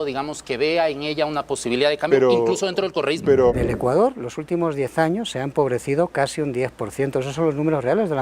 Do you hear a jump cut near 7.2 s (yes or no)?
no